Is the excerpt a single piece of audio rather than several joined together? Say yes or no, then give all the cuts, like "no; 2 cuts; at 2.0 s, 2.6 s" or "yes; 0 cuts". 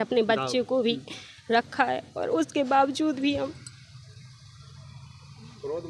yes; 0 cuts